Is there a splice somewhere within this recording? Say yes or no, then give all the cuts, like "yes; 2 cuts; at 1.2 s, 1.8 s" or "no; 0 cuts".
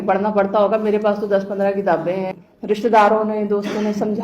yes; 1 cut; at 2.3 s